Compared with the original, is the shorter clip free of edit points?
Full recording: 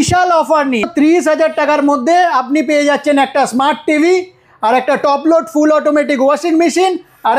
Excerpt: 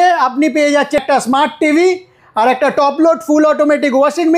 no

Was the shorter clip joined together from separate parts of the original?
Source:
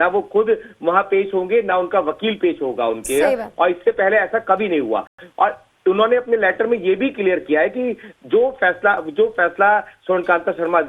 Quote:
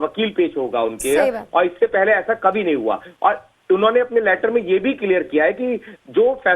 yes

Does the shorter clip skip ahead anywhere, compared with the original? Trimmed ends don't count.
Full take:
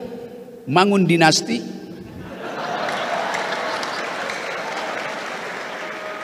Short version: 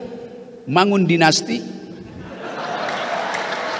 no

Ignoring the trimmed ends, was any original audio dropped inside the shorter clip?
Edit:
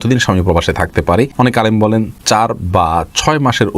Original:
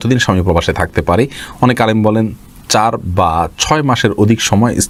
yes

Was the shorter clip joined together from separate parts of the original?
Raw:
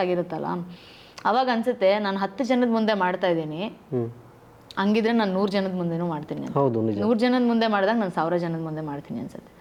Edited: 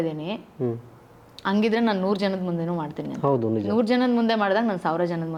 no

